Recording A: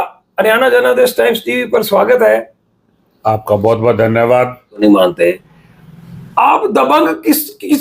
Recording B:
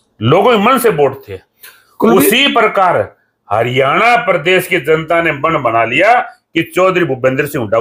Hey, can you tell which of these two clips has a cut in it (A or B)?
A